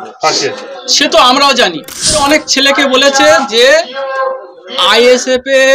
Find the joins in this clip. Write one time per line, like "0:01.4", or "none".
0:02.2